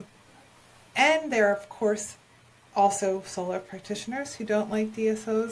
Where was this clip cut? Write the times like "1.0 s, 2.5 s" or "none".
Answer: none